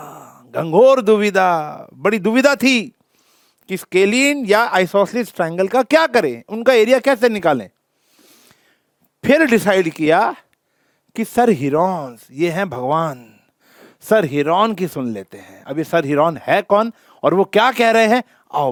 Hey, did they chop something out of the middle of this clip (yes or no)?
no